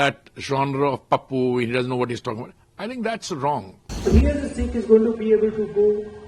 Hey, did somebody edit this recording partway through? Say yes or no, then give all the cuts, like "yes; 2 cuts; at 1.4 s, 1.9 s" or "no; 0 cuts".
yes; 1 cut; at 4.1 s